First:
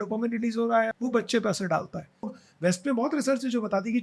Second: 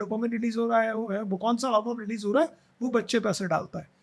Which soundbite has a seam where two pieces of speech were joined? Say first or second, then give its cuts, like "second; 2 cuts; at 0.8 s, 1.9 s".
first; 2 cuts; at 0.9 s, 2.3 s